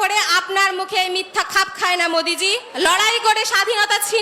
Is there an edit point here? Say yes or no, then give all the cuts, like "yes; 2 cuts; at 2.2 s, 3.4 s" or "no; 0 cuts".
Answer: yes; 1 cut; at 2.7 s